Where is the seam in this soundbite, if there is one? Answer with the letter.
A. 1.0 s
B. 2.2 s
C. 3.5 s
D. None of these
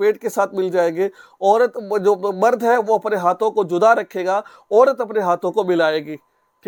D